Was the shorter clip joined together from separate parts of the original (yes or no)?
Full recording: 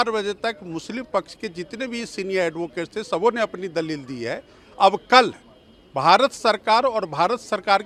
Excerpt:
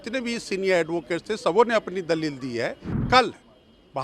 yes